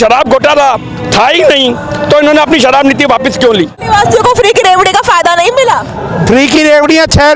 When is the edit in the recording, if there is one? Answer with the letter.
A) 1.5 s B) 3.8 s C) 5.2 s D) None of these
B